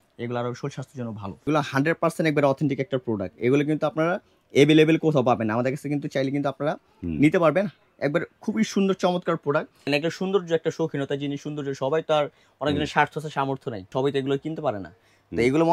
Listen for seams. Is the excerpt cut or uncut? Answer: cut